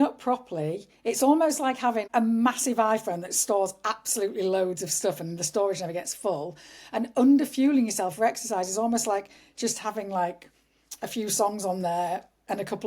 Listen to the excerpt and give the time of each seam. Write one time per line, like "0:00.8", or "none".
0:02.1

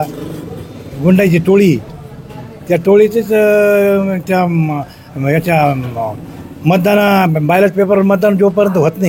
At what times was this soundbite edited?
none

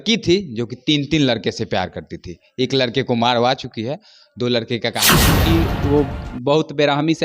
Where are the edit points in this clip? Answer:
0:05.4

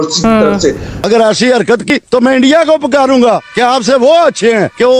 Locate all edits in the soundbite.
0:00.9

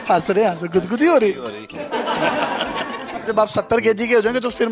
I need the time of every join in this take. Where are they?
0:03.3

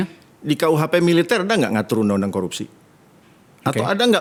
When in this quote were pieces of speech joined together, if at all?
none

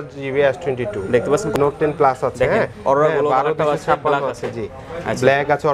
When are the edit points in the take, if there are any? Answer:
0:01.5

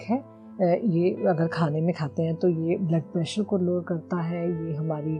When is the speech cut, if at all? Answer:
none

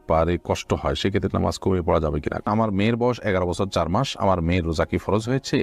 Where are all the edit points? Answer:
0:02.5

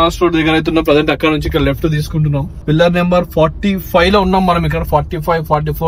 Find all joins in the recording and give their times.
0:02.5

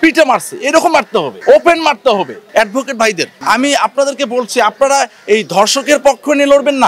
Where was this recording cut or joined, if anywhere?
0:01.3
0:02.4
0:03.3

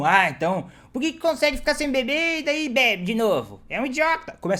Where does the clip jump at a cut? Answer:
none

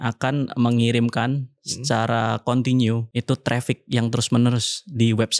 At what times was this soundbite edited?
0:03.1

